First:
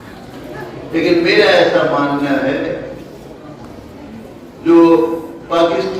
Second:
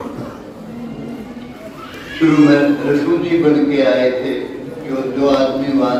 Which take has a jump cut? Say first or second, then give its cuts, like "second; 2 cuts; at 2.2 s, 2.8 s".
first; 1 cut; at 4.5 s